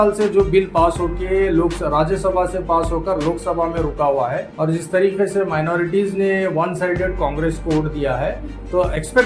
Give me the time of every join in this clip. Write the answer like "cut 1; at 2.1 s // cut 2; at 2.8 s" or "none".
cut 1; at 4.5 s